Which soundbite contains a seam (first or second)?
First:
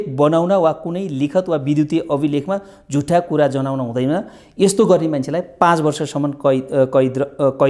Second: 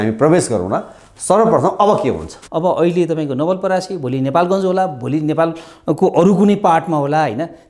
second